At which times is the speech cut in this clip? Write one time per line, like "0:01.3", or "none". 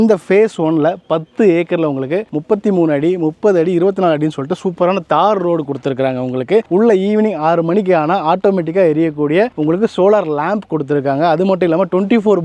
none